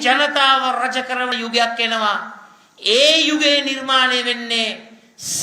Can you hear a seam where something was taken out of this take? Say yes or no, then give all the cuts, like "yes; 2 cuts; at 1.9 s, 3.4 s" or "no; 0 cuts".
yes; 1 cut; at 1.3 s